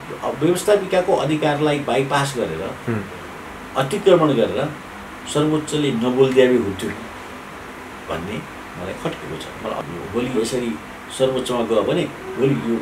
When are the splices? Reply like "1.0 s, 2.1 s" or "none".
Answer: 9.8 s